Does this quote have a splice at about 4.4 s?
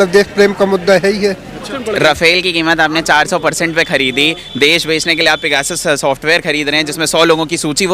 no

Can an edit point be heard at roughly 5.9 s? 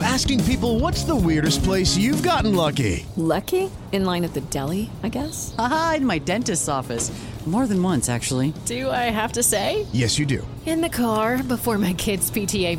no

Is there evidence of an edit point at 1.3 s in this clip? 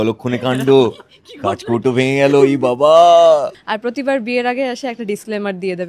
no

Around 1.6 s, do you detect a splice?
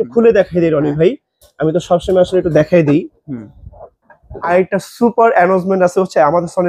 no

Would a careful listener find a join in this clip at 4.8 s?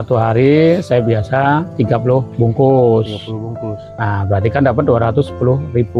no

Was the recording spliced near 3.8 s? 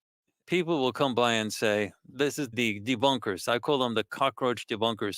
no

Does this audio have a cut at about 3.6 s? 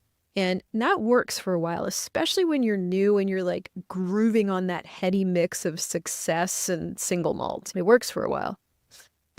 no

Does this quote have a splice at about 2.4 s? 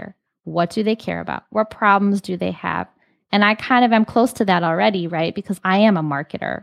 no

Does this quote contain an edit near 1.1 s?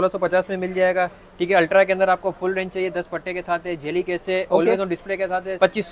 no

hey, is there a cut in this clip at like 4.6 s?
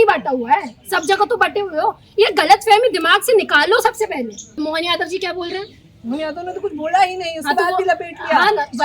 yes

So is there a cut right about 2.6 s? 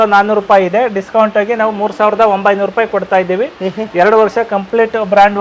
no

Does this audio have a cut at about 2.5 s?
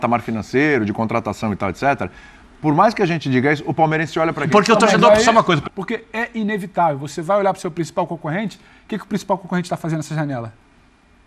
no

